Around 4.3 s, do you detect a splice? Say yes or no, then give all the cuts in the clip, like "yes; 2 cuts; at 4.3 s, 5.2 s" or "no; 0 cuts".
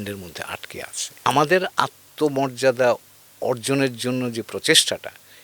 no; 1 cut; at 1.2 s